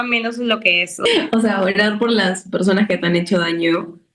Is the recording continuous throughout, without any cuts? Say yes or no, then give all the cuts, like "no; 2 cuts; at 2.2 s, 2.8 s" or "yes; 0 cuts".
no; 1 cut; at 1.0 s